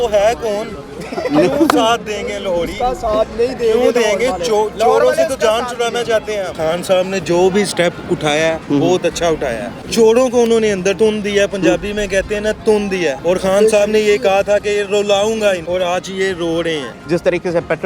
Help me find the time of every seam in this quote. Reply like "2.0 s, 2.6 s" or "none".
6.5 s, 9.8 s, 11.0 s, 13.2 s, 15.6 s, 16.9 s